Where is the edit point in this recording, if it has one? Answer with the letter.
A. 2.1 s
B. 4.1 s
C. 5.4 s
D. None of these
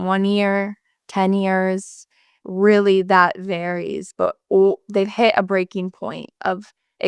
D